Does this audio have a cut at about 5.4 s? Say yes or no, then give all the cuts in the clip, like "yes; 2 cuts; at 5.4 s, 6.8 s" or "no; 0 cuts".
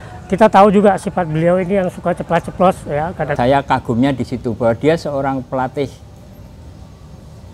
no; 1 cut; at 3.3 s